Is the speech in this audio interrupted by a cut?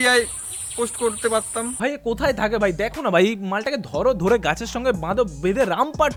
no; 0 cuts

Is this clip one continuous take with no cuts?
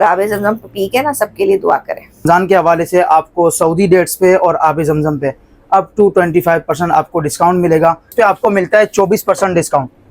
no; 2 cuts; at 2.2 s, 8.1 s

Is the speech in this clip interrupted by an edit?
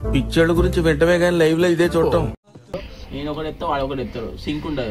yes; 1 cut; at 2.7 s

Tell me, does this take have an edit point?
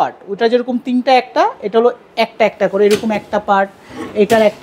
no; 0 cuts

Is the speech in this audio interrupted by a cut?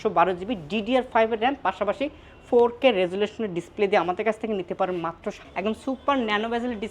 yes; 1 cut; at 5.4 s

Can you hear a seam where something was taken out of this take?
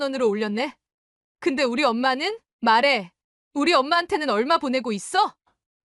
yes; 1 cut; at 2.4 s

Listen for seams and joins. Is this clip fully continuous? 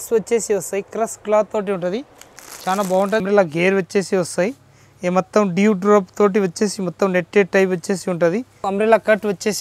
no; 2 cuts; at 3.2 s, 8.5 s

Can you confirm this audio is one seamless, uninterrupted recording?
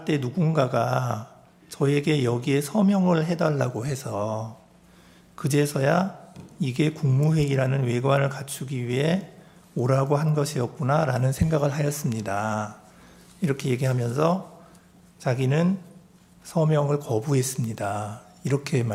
yes; 0 cuts

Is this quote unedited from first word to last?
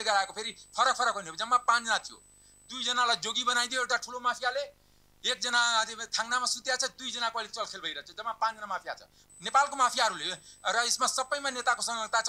no; 1 cut; at 9.2 s

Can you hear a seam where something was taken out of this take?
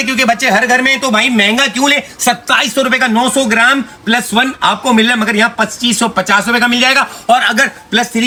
no; 0 cuts

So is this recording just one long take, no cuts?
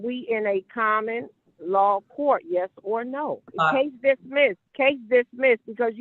no; 2 cuts; at 3.5 s, 4.6 s

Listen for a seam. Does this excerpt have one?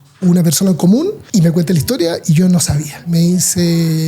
yes; 2 cuts; at 1.2 s, 3.1 s

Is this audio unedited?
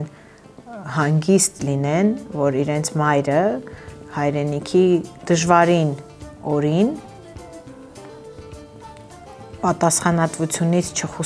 yes; 0 cuts

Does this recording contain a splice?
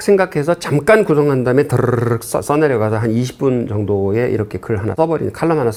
no; 0 cuts

